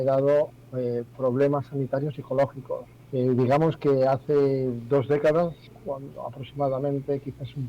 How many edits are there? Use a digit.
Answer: 2